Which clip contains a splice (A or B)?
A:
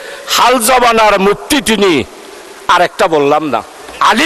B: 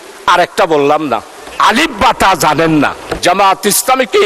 B